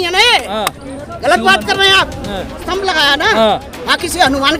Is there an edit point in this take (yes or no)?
yes